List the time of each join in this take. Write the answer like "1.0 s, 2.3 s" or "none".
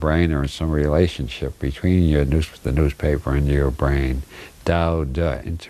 2.5 s